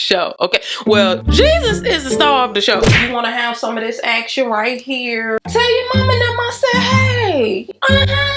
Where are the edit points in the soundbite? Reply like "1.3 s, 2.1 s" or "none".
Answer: 2.9 s, 5.4 s